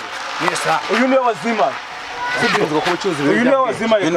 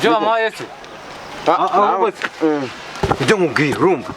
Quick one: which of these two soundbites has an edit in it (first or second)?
second